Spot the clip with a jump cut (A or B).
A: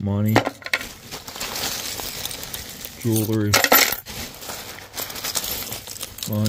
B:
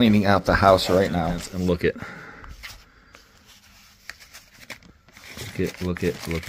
B